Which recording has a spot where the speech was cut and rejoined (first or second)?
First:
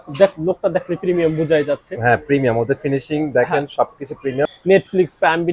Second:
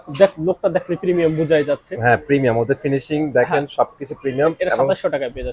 first